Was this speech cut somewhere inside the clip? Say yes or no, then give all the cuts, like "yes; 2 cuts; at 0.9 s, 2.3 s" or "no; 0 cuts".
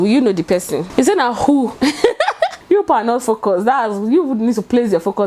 yes; 1 cut; at 2.6 s